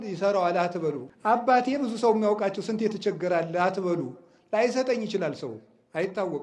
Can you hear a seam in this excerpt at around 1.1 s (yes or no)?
yes